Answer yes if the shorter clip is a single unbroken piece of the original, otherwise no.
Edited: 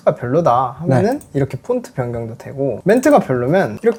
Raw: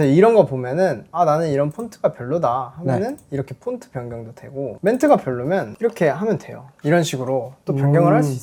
yes